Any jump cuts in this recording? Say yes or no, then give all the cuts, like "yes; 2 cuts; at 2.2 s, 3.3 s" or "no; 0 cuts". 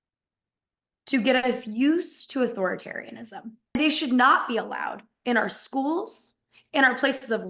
yes; 1 cut; at 3.8 s